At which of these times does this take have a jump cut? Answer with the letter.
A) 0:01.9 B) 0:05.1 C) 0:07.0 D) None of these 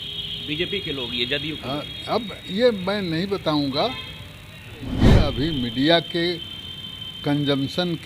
B